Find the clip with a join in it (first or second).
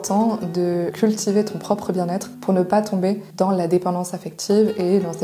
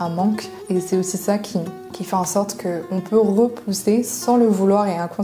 first